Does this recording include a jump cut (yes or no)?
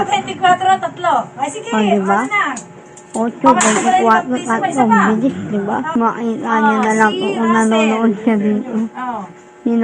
yes